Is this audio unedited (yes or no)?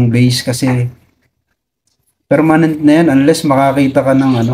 yes